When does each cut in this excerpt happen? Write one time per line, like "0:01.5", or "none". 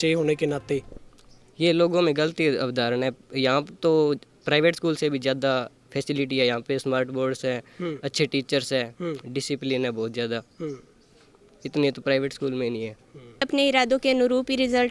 0:13.5